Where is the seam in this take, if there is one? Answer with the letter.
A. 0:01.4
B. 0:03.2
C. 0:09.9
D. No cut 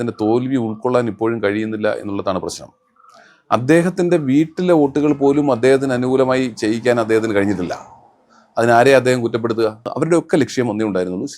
C